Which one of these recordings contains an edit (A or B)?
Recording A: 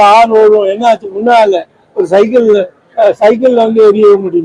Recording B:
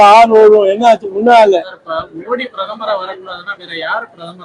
B